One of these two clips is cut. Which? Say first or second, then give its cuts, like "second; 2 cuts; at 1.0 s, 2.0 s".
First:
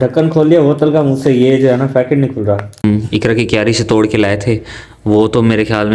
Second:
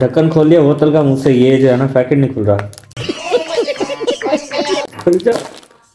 first; 1 cut; at 2.8 s